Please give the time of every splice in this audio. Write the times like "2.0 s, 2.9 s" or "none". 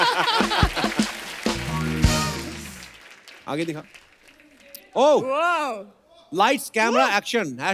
none